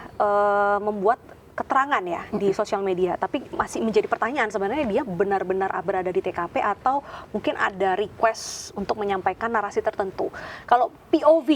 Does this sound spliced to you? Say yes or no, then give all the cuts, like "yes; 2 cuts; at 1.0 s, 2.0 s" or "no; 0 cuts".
no; 0 cuts